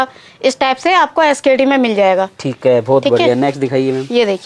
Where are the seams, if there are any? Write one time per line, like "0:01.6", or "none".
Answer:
none